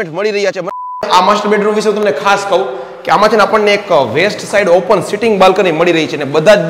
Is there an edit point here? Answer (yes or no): yes